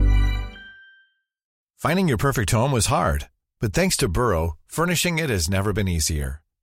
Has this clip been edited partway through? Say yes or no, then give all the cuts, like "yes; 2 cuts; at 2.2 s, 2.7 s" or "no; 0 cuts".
yes; 1 cut; at 1.6 s